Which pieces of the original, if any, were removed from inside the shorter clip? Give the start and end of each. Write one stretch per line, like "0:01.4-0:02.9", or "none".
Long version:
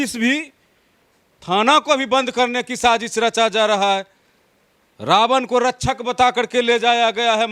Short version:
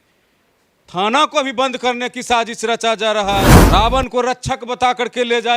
0:04.1-0:04.9